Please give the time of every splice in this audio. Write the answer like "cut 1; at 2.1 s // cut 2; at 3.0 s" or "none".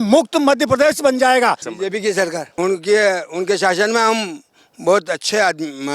cut 1; at 1.7 s // cut 2; at 2.6 s